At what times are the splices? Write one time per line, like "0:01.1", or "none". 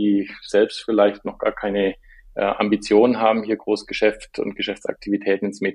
none